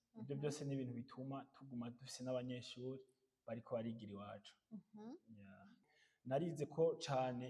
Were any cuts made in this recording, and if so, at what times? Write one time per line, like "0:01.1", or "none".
0:05.8